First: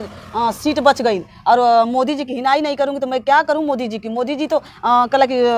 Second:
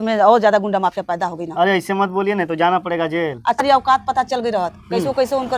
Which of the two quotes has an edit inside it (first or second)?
second